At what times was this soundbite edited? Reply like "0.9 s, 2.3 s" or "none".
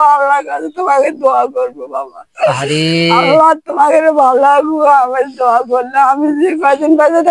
none